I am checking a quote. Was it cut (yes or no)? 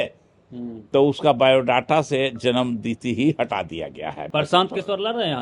yes